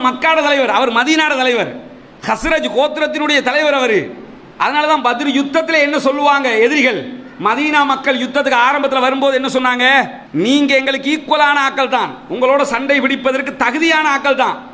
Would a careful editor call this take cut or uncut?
uncut